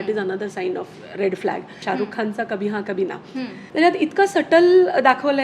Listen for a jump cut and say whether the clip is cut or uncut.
cut